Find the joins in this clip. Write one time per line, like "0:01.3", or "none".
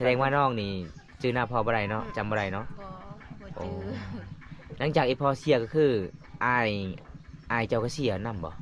none